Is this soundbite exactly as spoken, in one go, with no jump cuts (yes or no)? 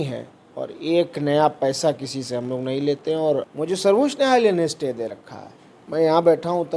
no